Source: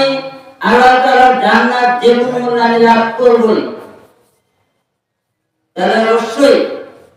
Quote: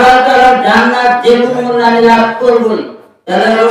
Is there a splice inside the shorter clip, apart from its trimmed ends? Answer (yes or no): yes